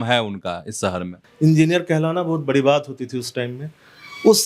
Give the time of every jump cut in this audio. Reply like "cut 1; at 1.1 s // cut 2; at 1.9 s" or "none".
cut 1; at 1.2 s

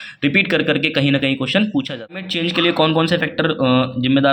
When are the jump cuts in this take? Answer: cut 1; at 2.3 s

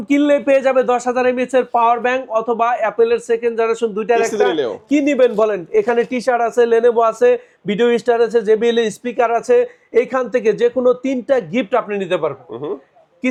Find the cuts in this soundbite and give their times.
none

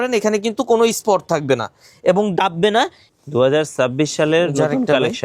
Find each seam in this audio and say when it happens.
cut 1; at 3.0 s

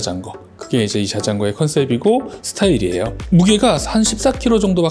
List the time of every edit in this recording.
none

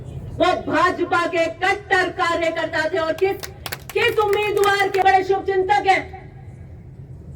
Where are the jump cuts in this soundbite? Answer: cut 1; at 5.0 s

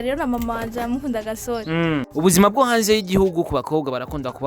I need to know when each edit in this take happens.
cut 1; at 2.1 s

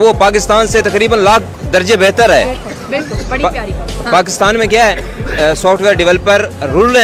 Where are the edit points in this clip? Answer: none

